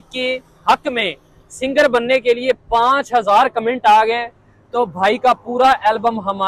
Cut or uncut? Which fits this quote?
uncut